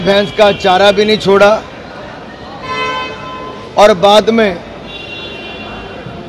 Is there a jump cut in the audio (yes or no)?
no